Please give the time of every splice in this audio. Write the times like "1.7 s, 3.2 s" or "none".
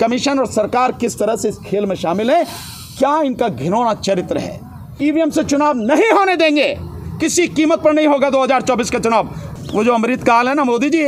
4.8 s, 9.4 s